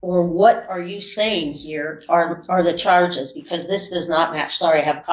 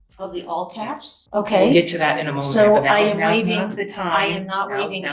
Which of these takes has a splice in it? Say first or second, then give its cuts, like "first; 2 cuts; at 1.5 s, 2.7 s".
second; 1 cut; at 1.2 s